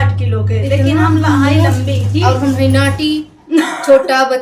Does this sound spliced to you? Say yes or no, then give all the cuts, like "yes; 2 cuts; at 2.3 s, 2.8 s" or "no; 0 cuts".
no; 0 cuts